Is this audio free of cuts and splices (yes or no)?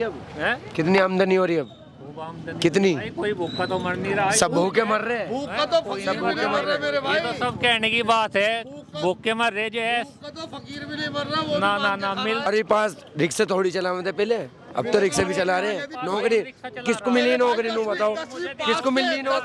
yes